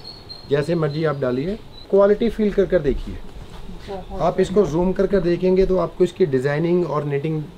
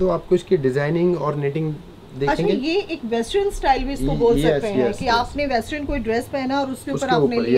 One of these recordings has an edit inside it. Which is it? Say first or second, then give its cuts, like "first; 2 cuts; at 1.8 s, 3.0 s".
first; 1 cut; at 1.8 s